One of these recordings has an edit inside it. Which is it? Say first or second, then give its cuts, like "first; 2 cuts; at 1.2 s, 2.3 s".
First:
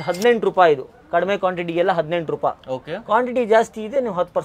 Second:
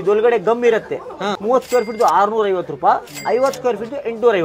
second; 2 cuts; at 1.3 s, 3.1 s